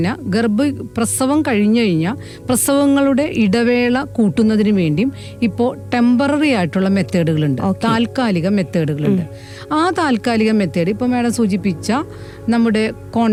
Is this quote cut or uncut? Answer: uncut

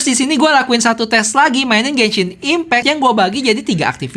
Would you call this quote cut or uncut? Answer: cut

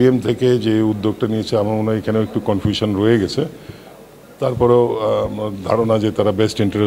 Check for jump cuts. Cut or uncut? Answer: uncut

